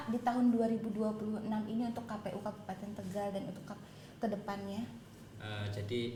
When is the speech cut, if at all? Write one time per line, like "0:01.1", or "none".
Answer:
none